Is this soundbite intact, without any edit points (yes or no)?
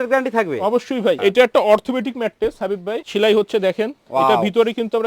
no